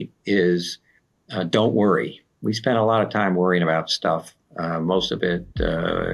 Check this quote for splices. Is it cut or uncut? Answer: cut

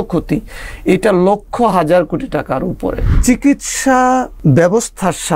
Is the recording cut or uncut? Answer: cut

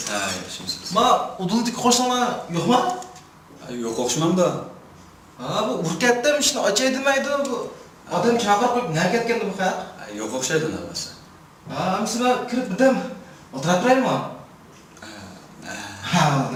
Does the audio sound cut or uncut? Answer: uncut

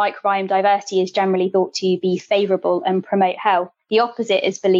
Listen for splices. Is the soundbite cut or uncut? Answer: uncut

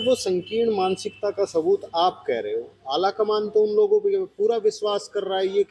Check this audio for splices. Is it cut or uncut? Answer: uncut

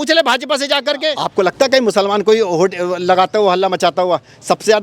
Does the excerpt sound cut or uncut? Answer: cut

